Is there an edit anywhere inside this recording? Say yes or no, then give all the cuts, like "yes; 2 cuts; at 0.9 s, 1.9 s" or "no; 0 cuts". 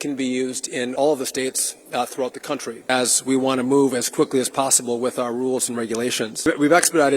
yes; 3 cuts; at 0.9 s, 2.9 s, 6.5 s